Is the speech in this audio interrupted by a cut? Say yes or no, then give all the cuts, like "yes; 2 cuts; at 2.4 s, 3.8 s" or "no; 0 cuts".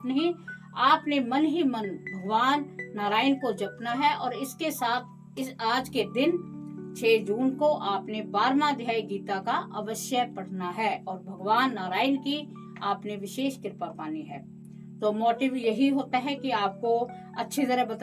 no; 0 cuts